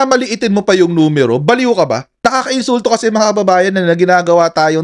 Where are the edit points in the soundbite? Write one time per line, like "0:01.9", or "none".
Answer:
none